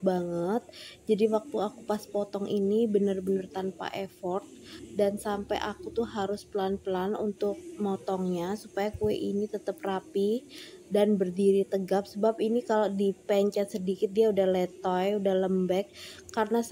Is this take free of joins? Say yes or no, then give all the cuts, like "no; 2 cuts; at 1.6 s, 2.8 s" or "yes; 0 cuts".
yes; 0 cuts